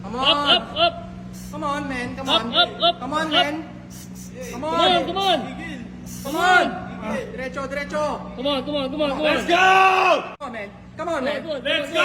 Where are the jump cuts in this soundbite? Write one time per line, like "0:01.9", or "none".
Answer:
0:10.4